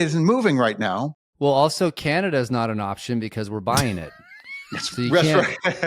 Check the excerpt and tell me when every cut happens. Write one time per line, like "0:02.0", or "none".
0:01.4